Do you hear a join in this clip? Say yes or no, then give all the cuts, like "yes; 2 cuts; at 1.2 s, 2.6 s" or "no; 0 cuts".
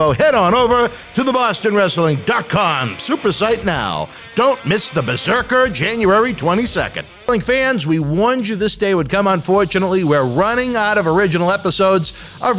yes; 1 cut; at 7.2 s